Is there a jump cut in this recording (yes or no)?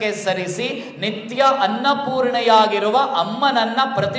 no